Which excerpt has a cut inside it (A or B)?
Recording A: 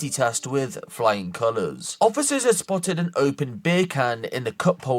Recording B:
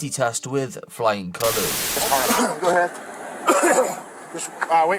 B